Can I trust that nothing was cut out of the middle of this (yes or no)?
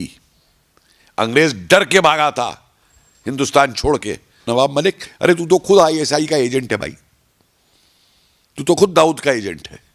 no